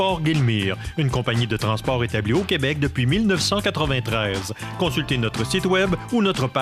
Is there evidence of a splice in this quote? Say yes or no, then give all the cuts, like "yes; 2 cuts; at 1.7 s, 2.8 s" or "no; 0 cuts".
no; 0 cuts